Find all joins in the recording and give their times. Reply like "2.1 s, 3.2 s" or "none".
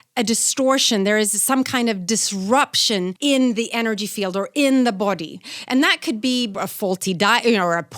3.1 s, 6.5 s